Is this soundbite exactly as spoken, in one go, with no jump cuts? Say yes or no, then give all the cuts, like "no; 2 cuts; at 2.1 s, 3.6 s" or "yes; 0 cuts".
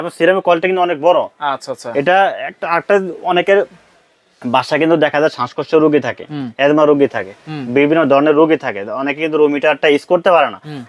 yes; 0 cuts